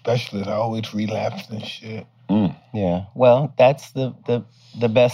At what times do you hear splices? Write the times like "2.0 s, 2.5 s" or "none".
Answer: none